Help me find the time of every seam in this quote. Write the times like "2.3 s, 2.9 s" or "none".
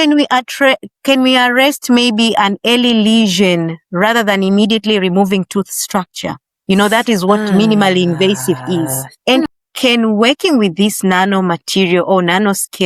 9.5 s